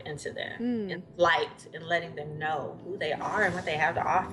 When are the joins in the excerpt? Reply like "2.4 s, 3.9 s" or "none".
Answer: none